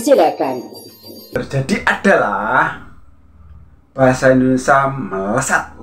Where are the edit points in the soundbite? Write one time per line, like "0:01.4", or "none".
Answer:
0:01.3